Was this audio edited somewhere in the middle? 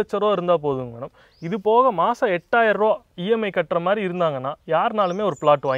no; 0 cuts

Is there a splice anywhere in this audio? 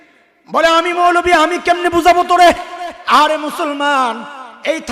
yes; 1 cut; at 2.9 s

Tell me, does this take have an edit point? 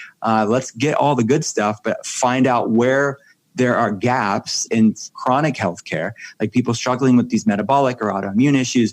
yes; 1 cut; at 4.7 s

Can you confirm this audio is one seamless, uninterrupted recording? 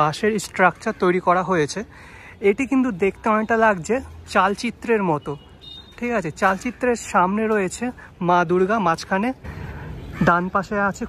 yes; 0 cuts

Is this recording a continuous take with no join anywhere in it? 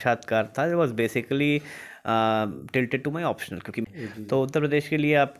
no; 1 cut; at 3.9 s

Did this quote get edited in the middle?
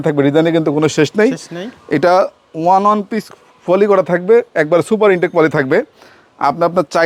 no; 0 cuts

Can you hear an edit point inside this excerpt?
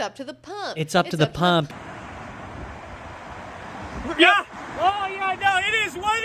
yes; 1 cut; at 1.7 s

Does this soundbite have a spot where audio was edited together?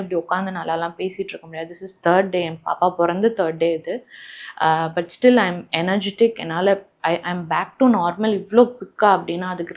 no; 0 cuts

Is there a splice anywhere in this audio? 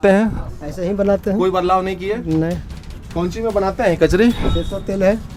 no; 0 cuts

